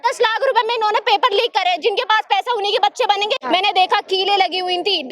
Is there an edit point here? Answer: yes; 1 cut; at 3.4 s

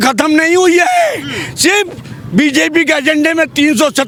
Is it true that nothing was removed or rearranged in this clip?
yes; 0 cuts

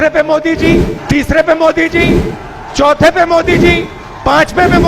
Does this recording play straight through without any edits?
no; 1 cut; at 0.9 s

